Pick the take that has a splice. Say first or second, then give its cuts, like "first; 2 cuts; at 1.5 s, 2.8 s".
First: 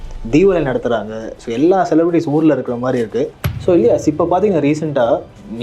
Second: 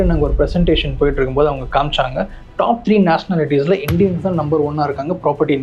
first; 1 cut; at 3.4 s